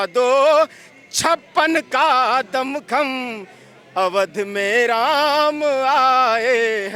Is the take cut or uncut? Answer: uncut